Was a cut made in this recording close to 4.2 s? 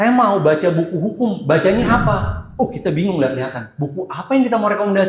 no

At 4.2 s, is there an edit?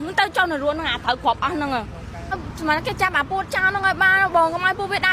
no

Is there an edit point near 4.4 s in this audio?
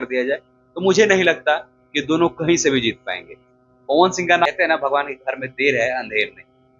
yes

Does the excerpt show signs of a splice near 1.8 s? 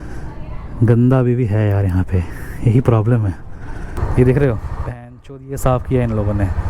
no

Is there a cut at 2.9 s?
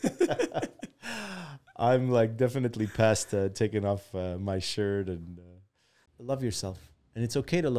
no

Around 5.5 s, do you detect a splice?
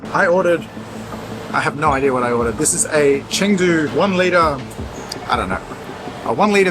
no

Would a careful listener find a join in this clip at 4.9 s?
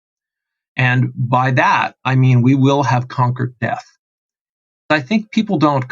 yes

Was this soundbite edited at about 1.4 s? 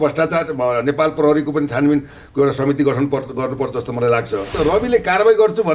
no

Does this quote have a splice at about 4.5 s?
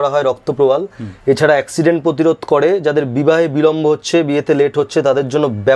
no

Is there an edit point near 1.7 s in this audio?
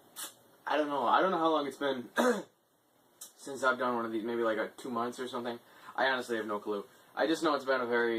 no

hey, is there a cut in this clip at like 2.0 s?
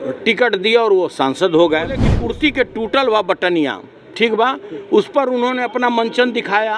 yes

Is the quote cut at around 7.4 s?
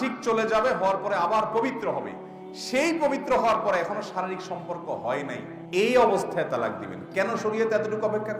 no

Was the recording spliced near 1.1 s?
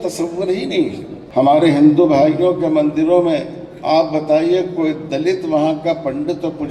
yes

